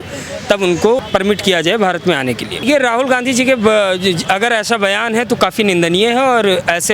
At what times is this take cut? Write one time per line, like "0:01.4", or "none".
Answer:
0:01.0
0:02.6